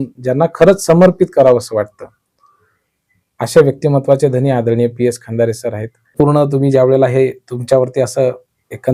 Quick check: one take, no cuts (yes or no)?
no